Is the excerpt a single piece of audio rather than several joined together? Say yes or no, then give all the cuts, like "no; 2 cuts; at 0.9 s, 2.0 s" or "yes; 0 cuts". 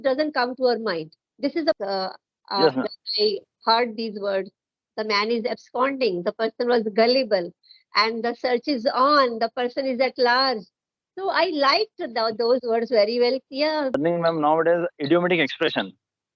no; 2 cuts; at 1.8 s, 14.0 s